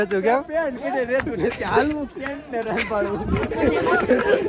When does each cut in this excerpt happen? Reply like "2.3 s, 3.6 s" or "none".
none